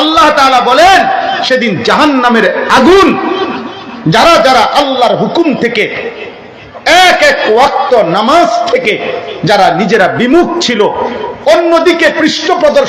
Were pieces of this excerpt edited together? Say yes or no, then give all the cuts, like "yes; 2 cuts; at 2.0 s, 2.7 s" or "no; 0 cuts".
no; 0 cuts